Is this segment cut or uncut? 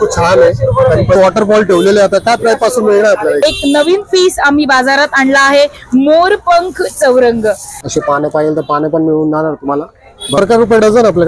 cut